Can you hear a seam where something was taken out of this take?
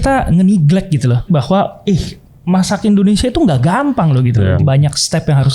yes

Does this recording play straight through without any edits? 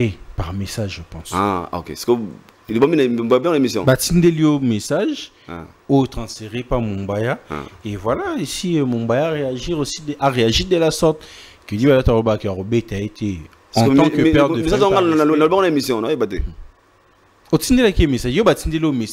yes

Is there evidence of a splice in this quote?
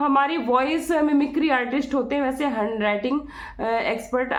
no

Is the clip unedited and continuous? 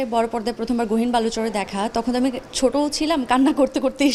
yes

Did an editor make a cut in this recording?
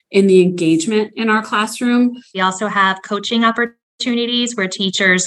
yes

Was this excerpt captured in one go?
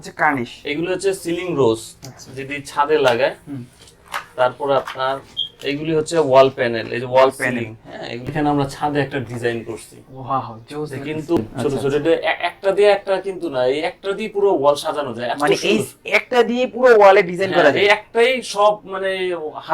no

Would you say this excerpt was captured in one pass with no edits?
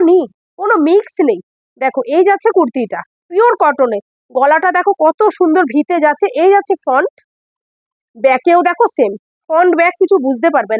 yes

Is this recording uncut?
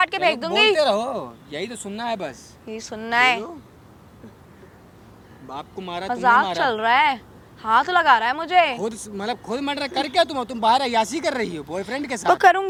yes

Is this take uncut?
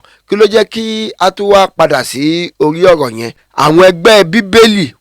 no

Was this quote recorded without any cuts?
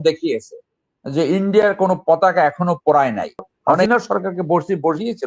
no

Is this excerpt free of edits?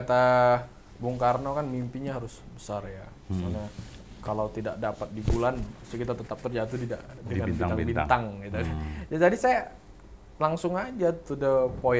yes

